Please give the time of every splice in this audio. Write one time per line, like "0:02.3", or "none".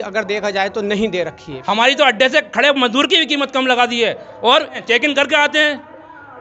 0:01.5
0:04.8